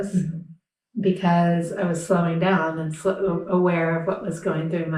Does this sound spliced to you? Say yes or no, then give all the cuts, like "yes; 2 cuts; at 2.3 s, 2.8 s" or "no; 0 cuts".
no; 0 cuts